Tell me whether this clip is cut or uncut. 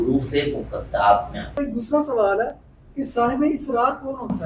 cut